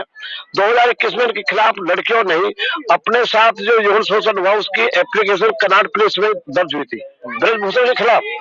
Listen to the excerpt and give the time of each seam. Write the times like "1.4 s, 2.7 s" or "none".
none